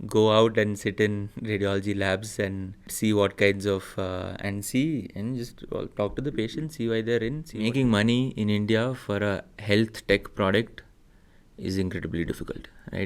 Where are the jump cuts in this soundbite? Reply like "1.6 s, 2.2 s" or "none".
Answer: 2.9 s, 7.5 s